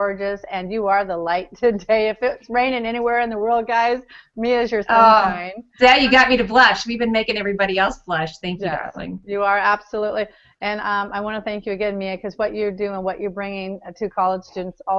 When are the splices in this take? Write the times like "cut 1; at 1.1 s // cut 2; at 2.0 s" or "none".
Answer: none